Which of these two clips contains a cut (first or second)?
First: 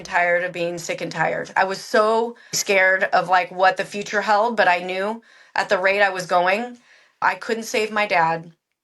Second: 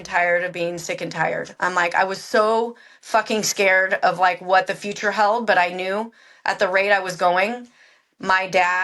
first